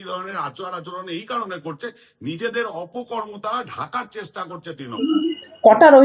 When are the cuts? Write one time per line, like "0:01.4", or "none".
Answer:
0:05.0